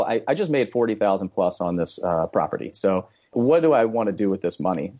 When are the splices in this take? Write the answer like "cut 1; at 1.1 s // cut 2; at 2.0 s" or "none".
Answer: cut 1; at 3.3 s

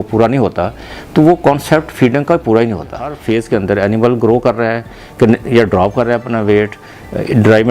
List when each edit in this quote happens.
cut 1; at 3.2 s

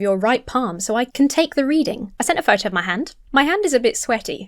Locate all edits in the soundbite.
cut 1; at 2.1 s // cut 2; at 3.2 s

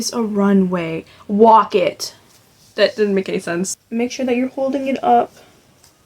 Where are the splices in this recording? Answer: cut 1; at 3.8 s

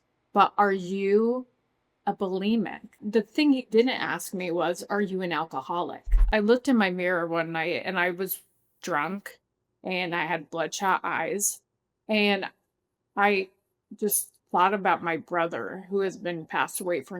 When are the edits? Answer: cut 1; at 3.0 s // cut 2; at 6.2 s

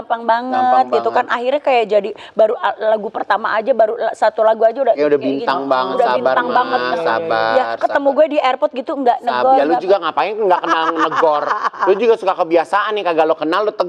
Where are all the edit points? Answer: none

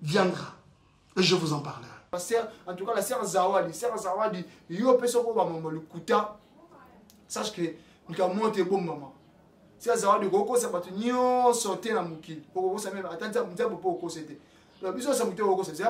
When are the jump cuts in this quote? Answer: cut 1; at 2.1 s

